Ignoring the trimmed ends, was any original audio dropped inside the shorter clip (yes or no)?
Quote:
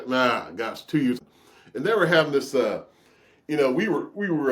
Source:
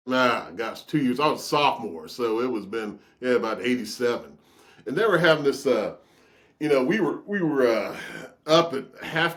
yes